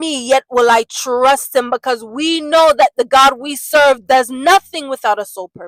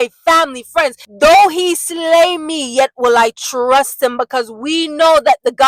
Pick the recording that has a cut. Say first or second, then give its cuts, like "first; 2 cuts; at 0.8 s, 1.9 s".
second; 1 cut; at 1.1 s